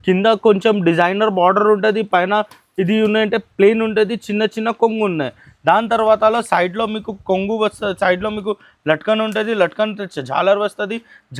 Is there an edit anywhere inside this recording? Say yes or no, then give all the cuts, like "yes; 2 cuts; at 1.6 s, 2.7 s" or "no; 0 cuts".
no; 0 cuts